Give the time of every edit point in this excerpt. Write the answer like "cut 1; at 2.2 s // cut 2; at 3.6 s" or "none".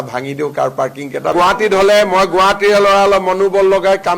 cut 1; at 1.3 s